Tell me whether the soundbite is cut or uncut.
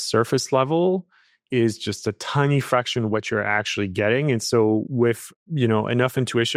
uncut